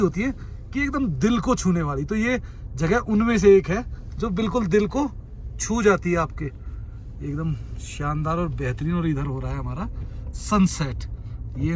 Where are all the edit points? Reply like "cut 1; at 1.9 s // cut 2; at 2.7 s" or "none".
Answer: none